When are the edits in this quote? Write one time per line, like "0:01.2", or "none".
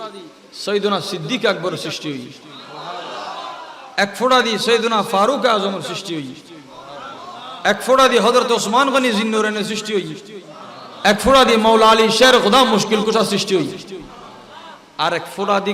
0:02.5

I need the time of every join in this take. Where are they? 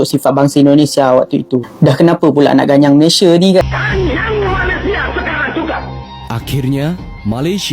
0:03.6

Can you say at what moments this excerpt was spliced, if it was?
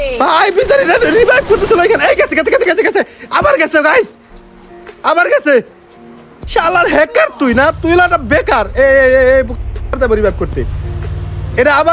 none

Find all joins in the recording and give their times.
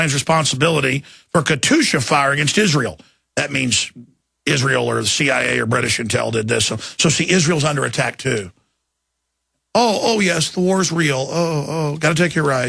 none

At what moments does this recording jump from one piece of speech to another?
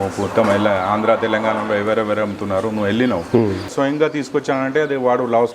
0:03.7

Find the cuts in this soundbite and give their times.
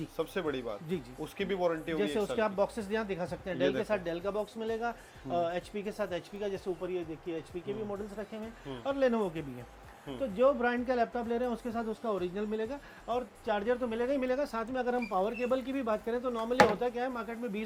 none

